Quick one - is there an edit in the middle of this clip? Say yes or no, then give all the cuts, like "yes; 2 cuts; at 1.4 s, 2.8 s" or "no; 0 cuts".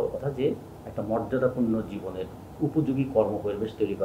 no; 0 cuts